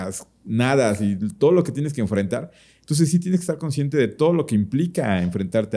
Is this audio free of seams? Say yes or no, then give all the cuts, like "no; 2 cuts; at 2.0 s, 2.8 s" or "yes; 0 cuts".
yes; 0 cuts